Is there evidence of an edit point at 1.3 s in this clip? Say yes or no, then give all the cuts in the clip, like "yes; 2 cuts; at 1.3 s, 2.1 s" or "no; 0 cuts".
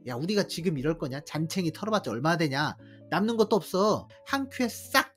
no; 1 cut; at 4.1 s